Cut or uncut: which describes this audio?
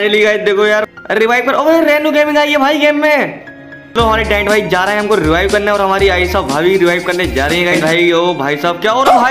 cut